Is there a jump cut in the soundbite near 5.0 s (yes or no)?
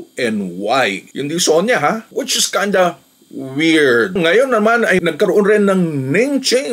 yes